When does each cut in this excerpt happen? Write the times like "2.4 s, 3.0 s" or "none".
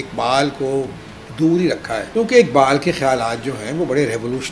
2.1 s